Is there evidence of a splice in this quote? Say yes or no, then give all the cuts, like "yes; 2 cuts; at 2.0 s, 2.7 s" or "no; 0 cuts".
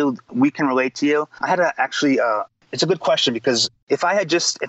yes; 3 cuts; at 1.3 s, 2.7 s, 3.7 s